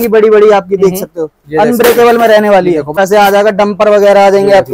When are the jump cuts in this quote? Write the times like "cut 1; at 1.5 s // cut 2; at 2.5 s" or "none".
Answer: cut 1; at 2.9 s